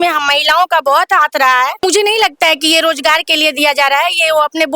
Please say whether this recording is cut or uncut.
cut